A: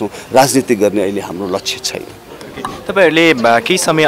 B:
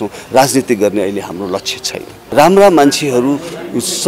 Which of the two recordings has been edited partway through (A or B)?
B